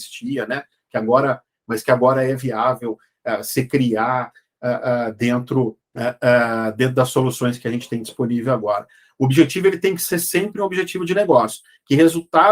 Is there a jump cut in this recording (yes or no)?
yes